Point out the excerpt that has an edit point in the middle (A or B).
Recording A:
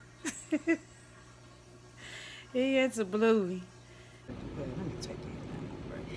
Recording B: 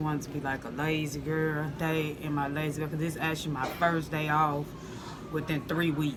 A